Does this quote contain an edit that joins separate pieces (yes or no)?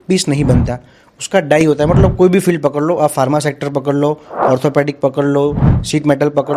no